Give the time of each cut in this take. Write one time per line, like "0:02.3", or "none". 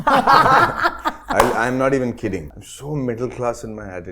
0:02.4